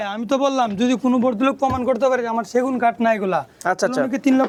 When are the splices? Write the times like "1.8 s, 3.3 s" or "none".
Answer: none